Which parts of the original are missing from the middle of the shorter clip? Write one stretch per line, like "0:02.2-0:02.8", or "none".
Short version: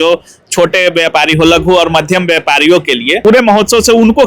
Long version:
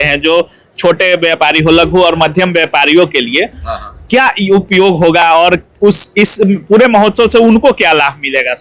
0:03.4-0:06.6